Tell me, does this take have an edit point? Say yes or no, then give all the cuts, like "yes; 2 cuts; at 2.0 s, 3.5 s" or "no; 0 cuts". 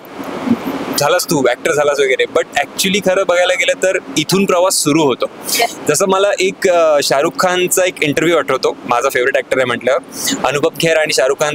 no; 0 cuts